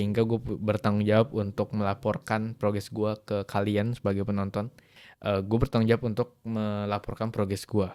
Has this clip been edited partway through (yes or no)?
no